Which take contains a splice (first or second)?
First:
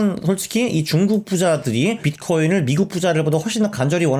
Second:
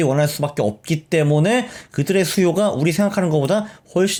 first